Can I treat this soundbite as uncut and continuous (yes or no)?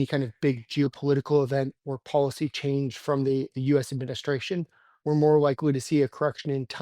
no